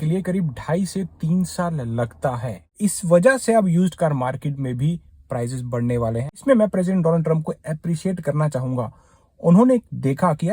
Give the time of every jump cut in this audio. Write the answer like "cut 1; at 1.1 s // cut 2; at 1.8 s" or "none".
cut 1; at 2.7 s // cut 2; at 6.4 s